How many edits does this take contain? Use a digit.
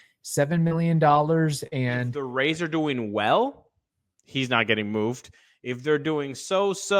1